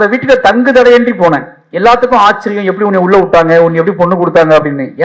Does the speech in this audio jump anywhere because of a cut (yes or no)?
no